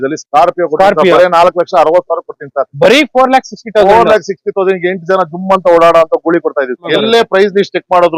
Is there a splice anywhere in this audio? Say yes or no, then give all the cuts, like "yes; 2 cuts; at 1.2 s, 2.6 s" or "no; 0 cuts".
yes; 1 cut; at 6.9 s